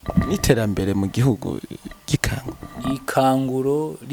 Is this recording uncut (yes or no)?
yes